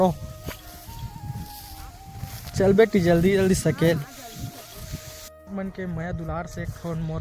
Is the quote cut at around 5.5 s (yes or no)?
yes